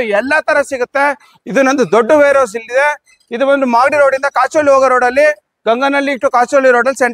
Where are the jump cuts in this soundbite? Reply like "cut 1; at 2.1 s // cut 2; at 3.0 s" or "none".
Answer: none